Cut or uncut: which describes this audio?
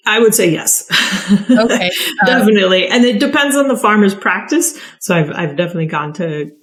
uncut